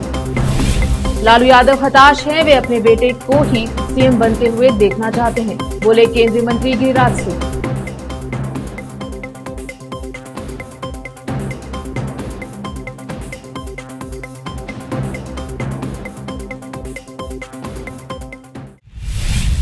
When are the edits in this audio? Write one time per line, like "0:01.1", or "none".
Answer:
0:18.7